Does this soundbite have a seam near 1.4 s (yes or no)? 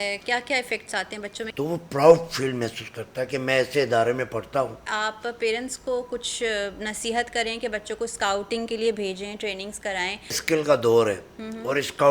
yes